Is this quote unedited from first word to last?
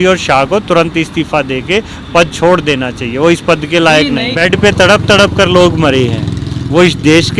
no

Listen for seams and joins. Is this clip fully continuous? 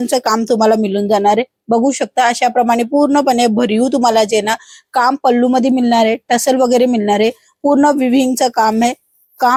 yes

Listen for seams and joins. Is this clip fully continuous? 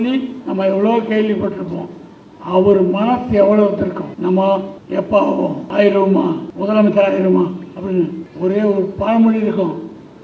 no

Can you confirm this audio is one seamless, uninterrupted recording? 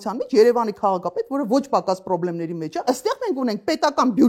no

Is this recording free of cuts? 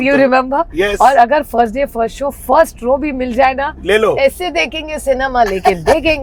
yes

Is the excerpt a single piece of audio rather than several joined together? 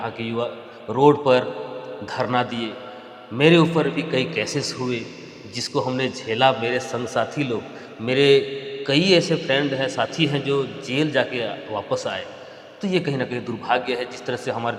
yes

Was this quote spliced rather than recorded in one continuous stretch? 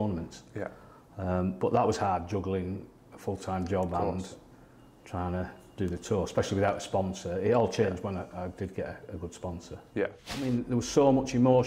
yes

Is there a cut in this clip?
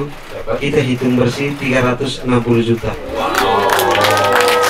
yes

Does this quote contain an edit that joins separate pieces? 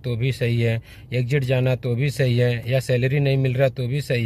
no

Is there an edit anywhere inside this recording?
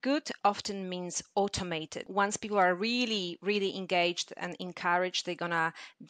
yes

